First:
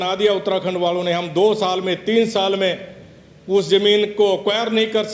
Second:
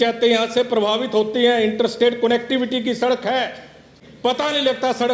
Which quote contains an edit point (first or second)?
second